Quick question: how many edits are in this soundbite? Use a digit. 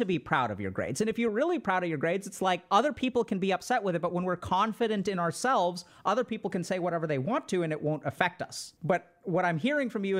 2